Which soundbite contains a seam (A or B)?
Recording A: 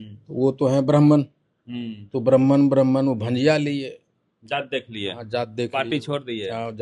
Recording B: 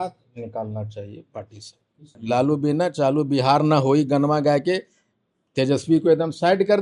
B